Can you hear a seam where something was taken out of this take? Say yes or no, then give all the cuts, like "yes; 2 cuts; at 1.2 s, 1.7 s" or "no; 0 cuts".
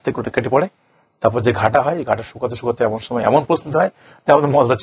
no; 0 cuts